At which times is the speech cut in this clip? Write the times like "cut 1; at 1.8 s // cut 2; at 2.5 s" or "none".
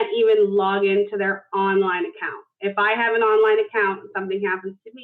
none